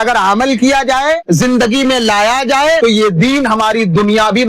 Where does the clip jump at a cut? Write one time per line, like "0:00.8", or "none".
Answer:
0:01.2
0:02.8